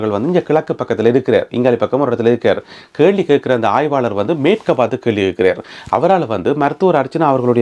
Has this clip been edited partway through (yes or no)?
no